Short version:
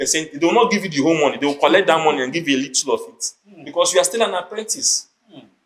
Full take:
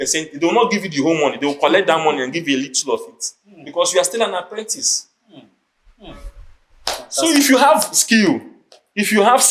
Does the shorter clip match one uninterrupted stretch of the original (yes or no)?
yes